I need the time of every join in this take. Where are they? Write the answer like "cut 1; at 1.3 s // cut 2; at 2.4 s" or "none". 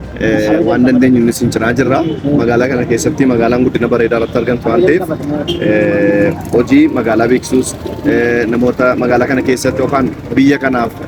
none